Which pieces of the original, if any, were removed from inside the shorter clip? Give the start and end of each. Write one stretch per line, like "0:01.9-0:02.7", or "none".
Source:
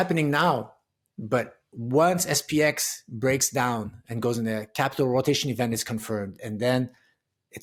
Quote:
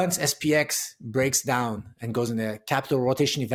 none